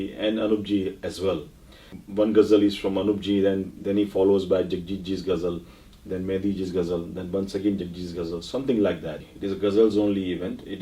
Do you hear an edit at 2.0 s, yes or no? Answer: yes